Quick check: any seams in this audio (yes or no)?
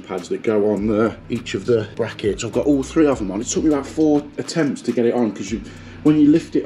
yes